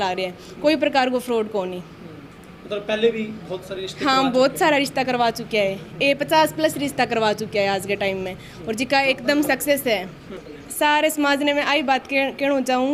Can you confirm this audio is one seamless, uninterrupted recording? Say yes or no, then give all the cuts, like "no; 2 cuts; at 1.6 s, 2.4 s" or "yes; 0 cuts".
yes; 0 cuts